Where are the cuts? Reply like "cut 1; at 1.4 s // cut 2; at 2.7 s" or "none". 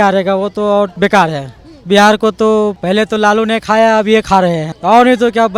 cut 1; at 0.9 s // cut 2; at 2.8 s // cut 3; at 4.7 s